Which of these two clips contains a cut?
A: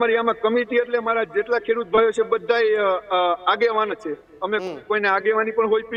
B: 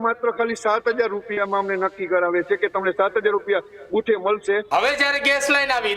B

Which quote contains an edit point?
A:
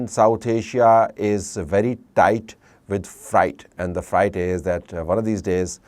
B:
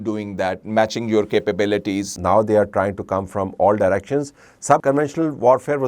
B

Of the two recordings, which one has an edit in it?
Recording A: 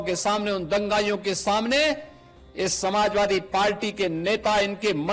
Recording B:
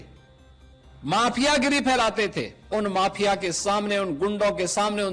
B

